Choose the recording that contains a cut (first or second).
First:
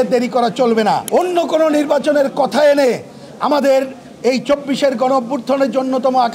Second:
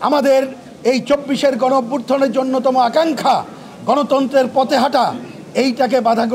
first